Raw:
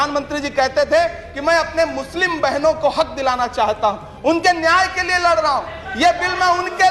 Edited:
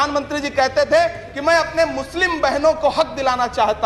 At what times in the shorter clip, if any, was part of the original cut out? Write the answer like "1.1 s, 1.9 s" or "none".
none

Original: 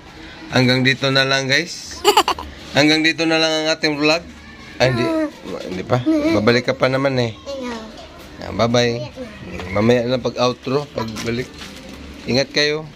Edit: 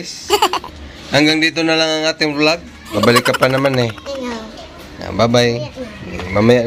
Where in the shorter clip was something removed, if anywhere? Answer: 3.0 s

